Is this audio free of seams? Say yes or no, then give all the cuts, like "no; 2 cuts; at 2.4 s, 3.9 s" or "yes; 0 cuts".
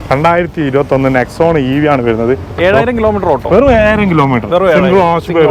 yes; 0 cuts